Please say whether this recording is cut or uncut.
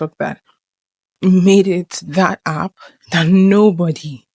uncut